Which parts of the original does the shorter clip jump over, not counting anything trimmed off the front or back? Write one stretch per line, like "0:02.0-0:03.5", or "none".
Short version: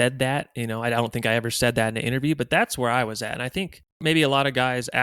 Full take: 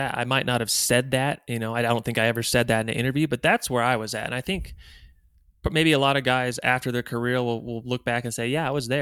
0:04.9-0:05.7